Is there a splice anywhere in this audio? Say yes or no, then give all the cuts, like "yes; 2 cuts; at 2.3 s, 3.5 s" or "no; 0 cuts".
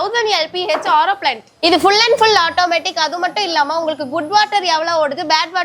yes; 1 cut; at 1.5 s